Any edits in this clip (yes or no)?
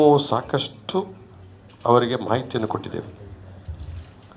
no